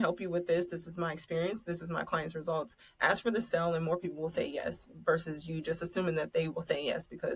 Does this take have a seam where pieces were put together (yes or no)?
no